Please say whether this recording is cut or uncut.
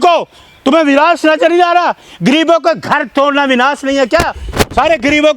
uncut